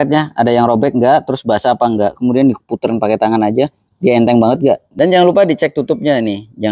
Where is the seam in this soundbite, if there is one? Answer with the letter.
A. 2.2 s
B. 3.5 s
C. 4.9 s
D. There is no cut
C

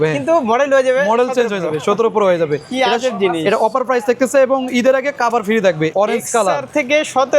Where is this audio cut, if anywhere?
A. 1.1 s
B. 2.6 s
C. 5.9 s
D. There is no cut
C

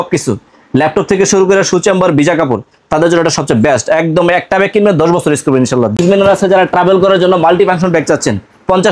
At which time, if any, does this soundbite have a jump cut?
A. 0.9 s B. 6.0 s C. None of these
B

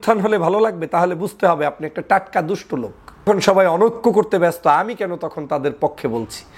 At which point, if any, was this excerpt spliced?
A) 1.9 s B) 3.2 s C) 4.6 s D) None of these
B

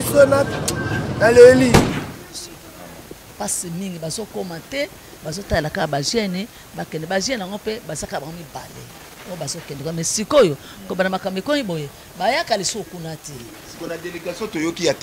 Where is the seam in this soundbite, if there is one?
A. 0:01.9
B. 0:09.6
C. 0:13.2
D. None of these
A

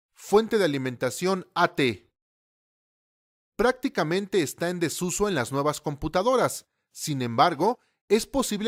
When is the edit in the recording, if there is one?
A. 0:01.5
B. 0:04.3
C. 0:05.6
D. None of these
D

